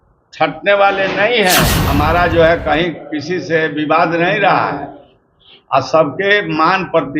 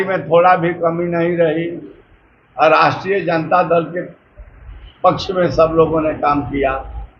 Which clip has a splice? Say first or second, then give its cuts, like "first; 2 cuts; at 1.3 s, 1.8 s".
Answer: first; 1 cut; at 1.8 s